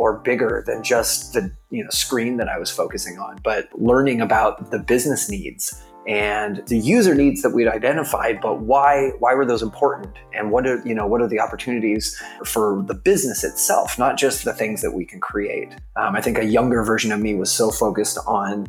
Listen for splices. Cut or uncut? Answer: cut